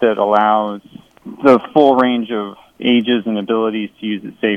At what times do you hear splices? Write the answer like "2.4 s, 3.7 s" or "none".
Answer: 1.3 s, 2.7 s